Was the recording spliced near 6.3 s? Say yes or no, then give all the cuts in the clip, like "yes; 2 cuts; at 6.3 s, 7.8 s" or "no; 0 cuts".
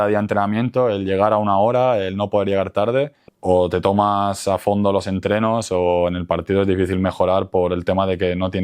no; 1 cut; at 3.3 s